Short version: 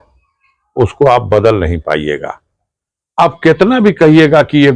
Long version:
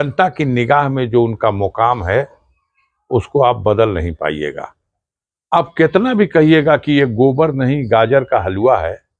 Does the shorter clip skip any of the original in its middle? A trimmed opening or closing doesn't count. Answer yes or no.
no